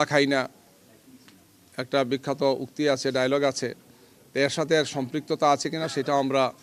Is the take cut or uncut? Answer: uncut